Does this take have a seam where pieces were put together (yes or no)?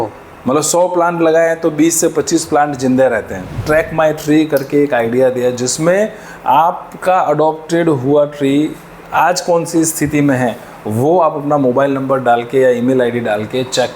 yes